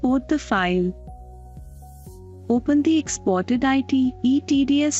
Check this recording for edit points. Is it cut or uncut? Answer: uncut